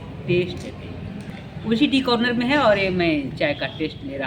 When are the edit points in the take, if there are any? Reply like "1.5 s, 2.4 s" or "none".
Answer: 1.3 s